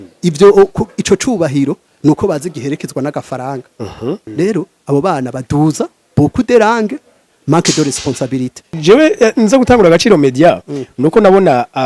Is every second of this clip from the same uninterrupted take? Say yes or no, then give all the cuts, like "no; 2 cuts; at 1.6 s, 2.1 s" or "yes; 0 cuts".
no; 2 cuts; at 4.3 s, 8.7 s